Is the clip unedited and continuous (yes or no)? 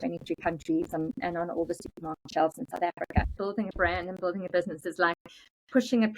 no